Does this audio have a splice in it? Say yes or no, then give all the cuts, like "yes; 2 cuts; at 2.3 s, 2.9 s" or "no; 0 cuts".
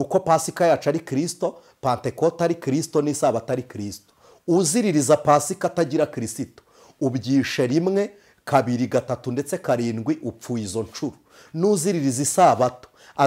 no; 0 cuts